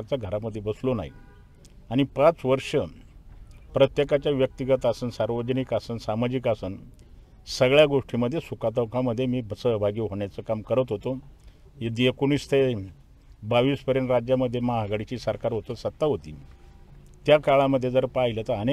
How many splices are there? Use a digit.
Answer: 0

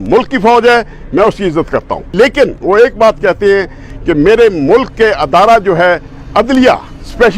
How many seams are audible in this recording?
1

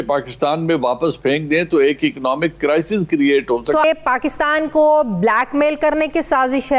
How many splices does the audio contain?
1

